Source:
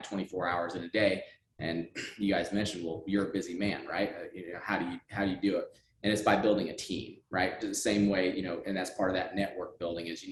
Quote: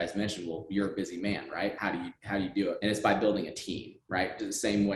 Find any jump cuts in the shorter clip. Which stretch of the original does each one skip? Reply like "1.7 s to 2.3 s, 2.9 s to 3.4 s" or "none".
4.1 s to 4.6 s, 5.6 s to 6.0 s

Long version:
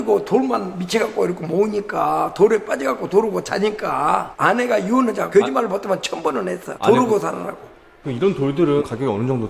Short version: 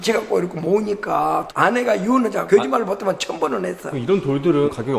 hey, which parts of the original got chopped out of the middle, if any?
2.3 s to 4.3 s, 6.6 s to 7.9 s

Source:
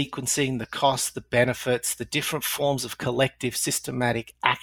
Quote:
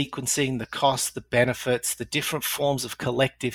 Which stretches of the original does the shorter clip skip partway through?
none

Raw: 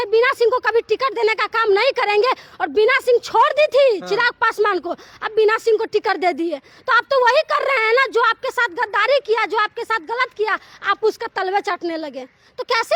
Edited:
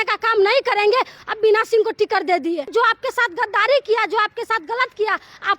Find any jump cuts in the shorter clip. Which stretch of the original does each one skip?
2.5 s to 5.1 s, 6.6 s to 8.1 s

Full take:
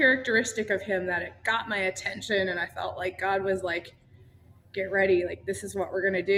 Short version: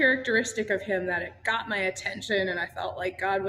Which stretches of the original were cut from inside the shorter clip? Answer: none

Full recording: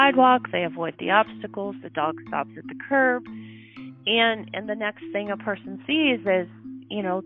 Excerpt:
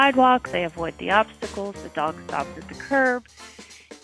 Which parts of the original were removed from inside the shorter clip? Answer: none

